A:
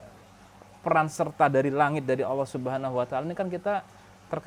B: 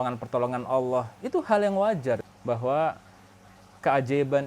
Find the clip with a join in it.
B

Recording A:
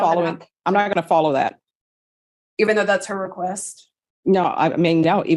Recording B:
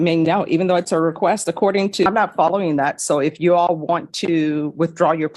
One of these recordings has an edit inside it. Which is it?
B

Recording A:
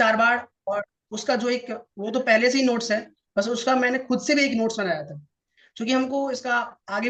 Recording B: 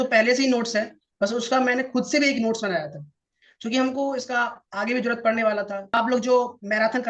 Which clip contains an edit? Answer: B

